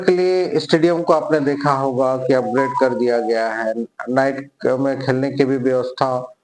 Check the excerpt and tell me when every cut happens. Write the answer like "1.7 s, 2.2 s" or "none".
none